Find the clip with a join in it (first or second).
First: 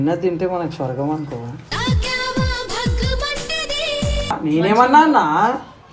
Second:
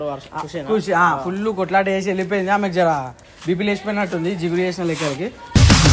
first